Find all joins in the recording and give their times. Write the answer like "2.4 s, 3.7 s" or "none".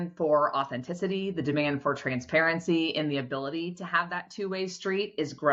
none